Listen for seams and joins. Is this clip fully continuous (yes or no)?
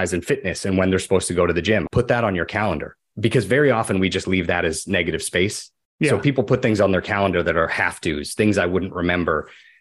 no